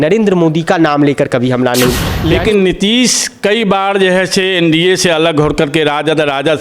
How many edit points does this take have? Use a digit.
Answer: 1